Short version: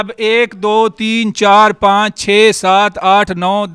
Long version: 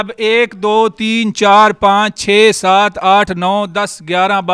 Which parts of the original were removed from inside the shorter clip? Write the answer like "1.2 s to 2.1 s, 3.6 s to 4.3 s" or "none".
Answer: none

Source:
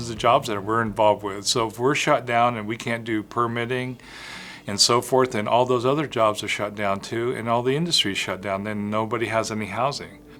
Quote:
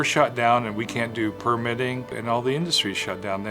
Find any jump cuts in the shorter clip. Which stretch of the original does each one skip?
4.1 s to 7.4 s

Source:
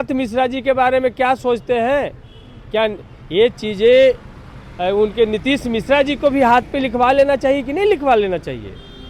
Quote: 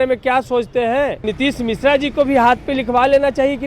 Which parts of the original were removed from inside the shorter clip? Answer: 2.2 s to 5.3 s

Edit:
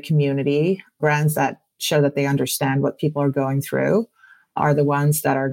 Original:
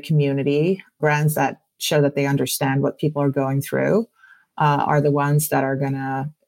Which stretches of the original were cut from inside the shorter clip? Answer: 4.5 s to 4.8 s

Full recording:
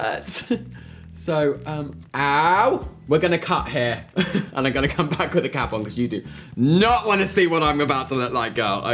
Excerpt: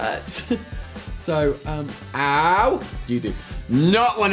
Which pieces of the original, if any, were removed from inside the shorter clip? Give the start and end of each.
2.9 s to 5.8 s

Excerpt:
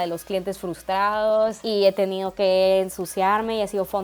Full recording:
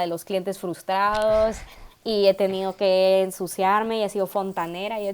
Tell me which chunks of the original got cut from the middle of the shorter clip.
1.6 s to 2.0 s

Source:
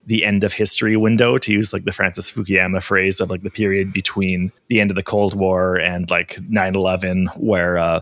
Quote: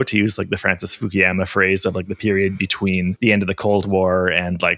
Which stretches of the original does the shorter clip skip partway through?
4.5 s to 4.6 s

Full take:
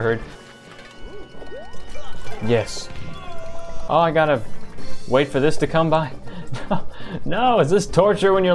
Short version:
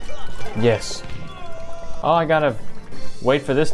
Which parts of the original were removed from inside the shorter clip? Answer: none

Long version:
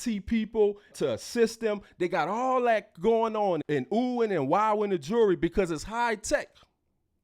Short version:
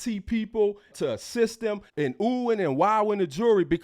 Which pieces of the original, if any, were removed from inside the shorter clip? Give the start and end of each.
1.9 s to 3.6 s

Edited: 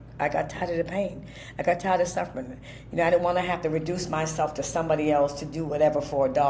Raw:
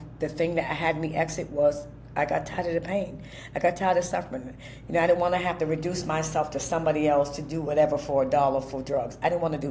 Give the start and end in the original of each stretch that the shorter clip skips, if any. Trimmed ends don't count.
none

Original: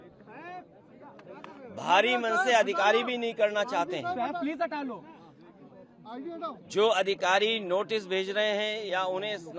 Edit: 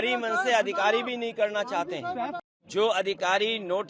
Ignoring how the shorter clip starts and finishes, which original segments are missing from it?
4.4 s to 6.4 s

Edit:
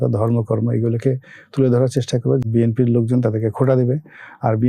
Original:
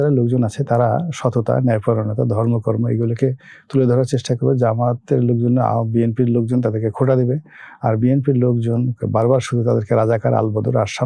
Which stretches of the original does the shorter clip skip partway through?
4.6 s to 5.8 s

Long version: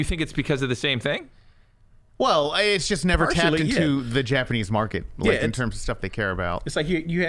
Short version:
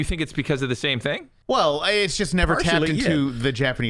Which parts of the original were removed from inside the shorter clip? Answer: 1.3 s to 2.0 s

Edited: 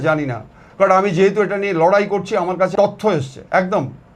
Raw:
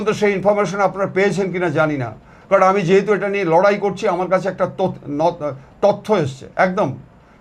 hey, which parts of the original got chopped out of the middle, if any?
4.4 s to 5.8 s

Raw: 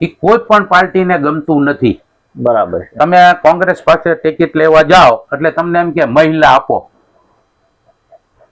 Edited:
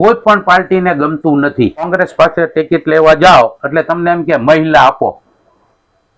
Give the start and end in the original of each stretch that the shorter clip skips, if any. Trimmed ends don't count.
2.1 s to 3.6 s

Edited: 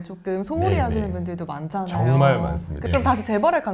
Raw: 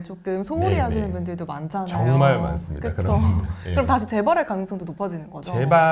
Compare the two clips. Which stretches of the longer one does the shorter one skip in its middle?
2.7 s to 3.6 s

